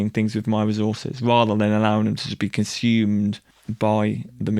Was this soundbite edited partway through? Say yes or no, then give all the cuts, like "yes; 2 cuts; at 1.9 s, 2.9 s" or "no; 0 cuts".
no; 0 cuts